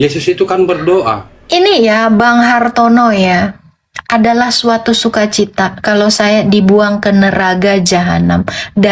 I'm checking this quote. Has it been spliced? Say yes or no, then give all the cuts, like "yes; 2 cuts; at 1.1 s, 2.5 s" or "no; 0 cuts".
yes; 1 cut; at 1.3 s